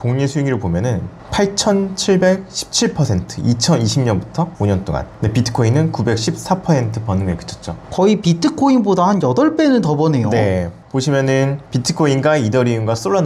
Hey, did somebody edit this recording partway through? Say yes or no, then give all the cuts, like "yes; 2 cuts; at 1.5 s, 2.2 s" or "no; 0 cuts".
no; 0 cuts